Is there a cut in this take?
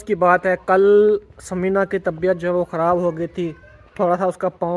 no; 0 cuts

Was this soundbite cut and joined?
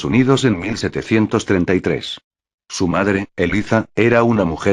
yes; 1 cut; at 1.8 s

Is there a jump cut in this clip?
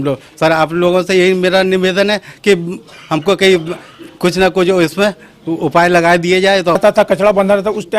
yes; 1 cut; at 6.8 s

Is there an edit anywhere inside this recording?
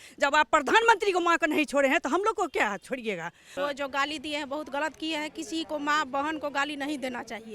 yes; 1 cut; at 3.4 s

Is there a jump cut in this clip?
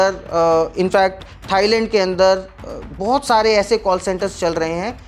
no; 0 cuts

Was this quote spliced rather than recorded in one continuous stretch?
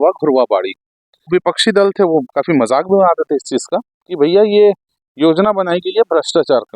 yes; 1 cut; at 1.3 s

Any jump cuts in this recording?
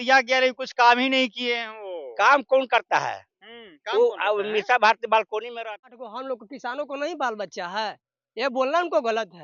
yes; 1 cut; at 5.9 s

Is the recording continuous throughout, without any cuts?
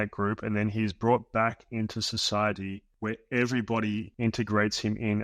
no; 2 cuts; at 2.9 s, 4.1 s

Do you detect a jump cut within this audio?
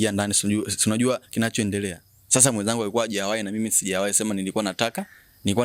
no; 0 cuts

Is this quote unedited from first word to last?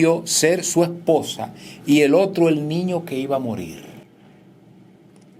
yes; 0 cuts

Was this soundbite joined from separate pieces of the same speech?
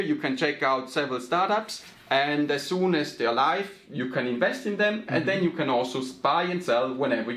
no; 0 cuts

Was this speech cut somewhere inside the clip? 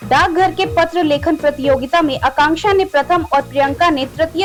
no; 0 cuts

